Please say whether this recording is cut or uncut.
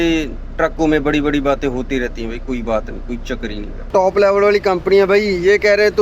cut